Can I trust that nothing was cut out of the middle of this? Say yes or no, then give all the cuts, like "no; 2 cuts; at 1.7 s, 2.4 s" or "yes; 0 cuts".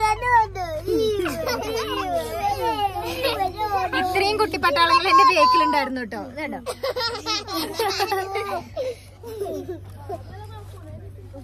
yes; 0 cuts